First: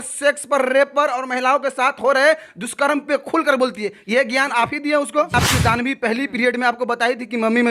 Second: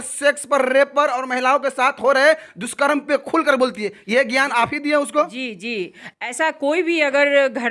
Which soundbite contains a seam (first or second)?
first